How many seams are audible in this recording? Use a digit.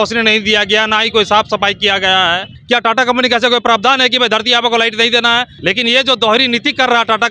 2